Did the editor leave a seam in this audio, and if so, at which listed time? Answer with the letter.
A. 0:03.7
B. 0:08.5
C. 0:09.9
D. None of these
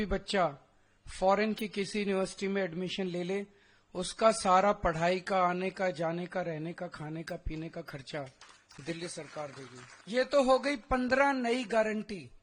C